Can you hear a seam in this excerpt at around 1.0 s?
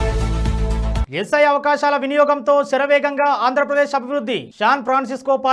yes; 1 cut; at 1.0 s

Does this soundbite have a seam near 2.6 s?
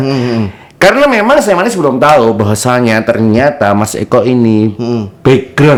no; 0 cuts

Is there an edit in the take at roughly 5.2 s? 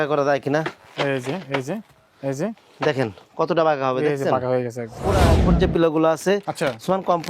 yes; 1 cut; at 5.2 s

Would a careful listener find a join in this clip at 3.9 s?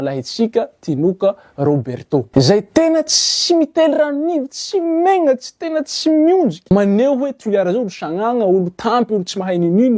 no; 2 cuts; at 2.3 s, 6.6 s

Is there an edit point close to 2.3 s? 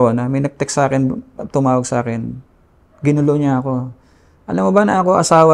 no; 0 cuts

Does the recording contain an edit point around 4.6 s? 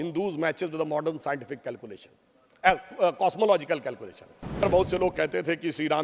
yes; 1 cut; at 4.6 s

